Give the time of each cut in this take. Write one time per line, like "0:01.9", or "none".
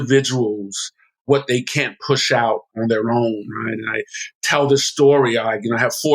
0:01.3
0:02.7